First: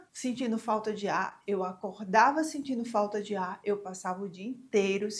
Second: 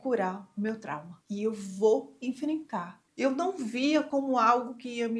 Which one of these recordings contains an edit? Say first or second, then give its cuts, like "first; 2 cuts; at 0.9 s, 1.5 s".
second; 1 cut; at 3.0 s